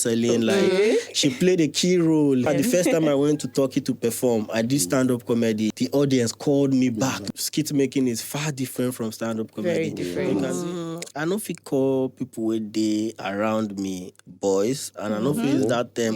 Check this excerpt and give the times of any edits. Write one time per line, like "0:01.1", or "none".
0:02.5
0:05.7
0:07.2
0:10.3